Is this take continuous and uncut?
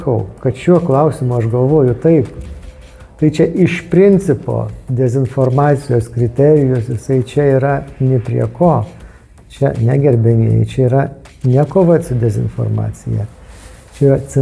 yes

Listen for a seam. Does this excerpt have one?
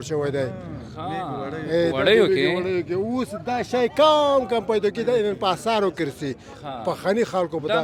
no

